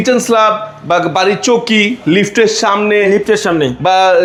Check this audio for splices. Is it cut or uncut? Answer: uncut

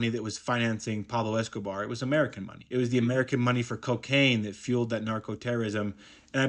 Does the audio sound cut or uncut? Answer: uncut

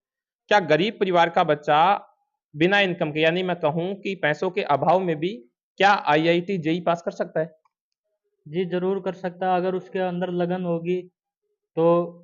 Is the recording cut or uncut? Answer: uncut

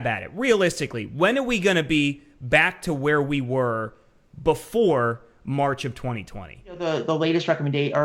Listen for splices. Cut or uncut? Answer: cut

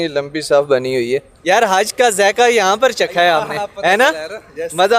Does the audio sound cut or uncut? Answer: cut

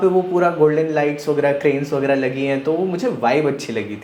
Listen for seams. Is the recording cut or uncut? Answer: uncut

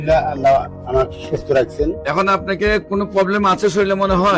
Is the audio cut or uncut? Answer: uncut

